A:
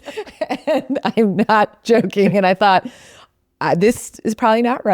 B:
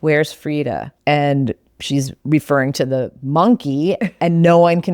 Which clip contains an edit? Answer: B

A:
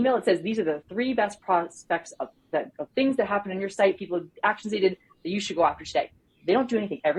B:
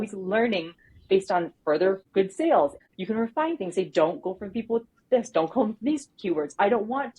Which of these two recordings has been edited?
B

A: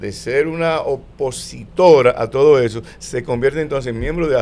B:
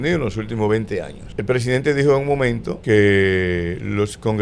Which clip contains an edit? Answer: B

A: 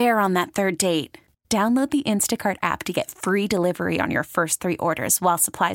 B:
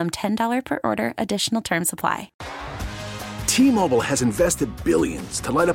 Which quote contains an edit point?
B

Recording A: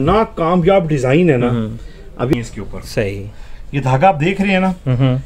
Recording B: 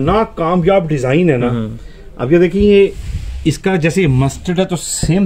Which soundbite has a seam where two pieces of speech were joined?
A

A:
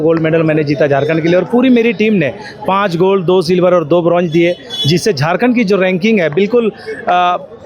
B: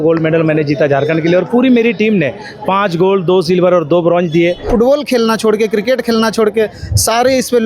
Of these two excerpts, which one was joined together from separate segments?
B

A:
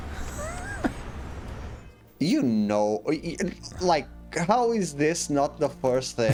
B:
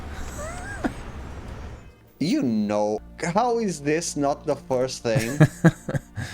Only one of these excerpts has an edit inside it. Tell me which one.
B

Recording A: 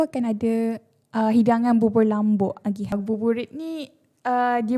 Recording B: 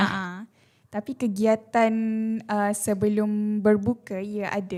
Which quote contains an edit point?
A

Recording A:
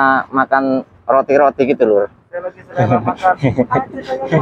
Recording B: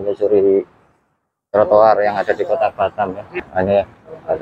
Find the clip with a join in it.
B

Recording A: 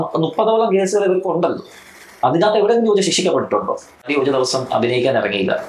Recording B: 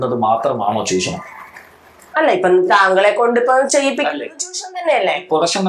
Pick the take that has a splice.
A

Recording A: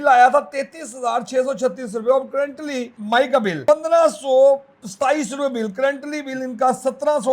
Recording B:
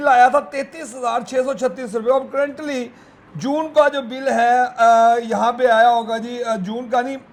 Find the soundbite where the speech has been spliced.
A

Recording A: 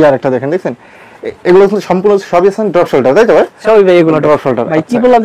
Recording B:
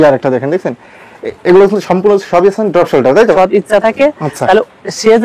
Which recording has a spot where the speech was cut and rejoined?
B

